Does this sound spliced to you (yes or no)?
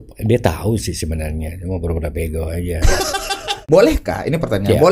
yes